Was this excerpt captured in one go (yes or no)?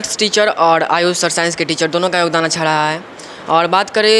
yes